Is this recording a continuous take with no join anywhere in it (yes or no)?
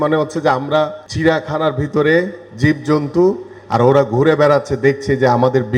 no